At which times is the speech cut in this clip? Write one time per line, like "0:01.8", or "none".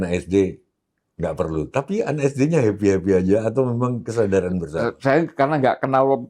none